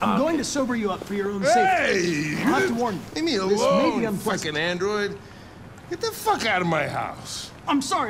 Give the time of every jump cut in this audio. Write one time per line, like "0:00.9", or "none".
none